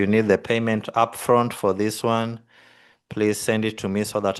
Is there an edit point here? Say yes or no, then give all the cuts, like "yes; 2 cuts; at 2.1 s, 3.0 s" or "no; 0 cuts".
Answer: no; 0 cuts